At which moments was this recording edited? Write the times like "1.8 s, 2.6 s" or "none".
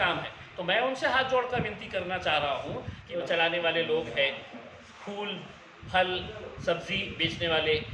3.0 s